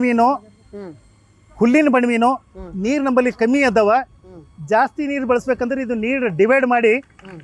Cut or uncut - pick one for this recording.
uncut